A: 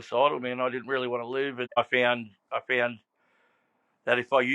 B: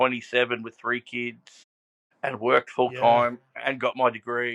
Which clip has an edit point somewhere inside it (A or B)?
A